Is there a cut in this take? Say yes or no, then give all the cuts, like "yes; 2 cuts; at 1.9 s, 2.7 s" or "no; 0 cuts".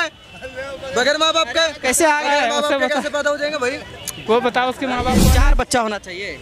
yes; 1 cut; at 5.2 s